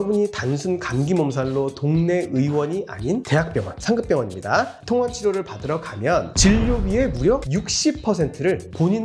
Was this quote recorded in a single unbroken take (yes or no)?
yes